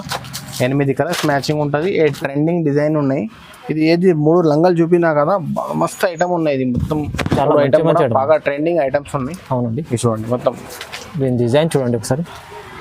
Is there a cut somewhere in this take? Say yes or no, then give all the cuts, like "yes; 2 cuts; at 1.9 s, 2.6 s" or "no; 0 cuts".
yes; 1 cut; at 2.2 s